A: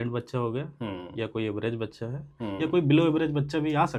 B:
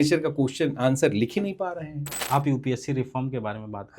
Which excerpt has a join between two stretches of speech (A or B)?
B